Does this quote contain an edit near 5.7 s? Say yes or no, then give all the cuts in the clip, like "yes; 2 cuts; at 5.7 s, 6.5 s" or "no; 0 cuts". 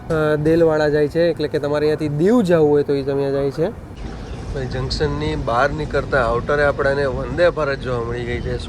no; 1 cut; at 4.1 s